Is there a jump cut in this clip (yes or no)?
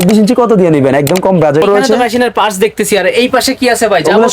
yes